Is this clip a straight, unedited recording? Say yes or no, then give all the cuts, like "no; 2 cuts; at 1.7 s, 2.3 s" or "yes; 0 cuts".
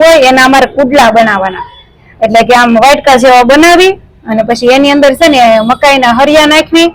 yes; 0 cuts